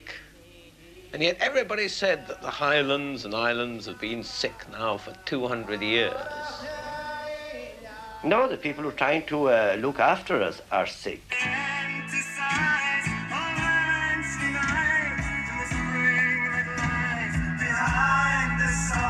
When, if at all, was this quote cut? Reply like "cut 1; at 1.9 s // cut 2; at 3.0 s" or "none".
none